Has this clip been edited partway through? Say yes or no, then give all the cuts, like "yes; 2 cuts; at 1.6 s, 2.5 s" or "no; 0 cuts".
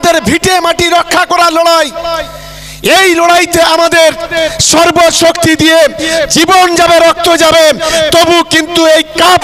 no; 0 cuts